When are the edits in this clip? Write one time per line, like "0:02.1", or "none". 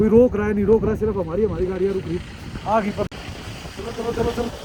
none